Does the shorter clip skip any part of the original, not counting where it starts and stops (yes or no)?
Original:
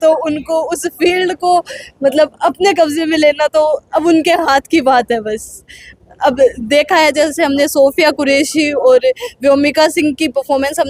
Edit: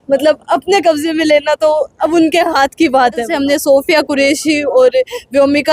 yes